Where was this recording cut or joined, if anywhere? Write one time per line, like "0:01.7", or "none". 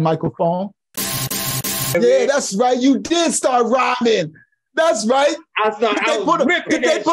0:01.4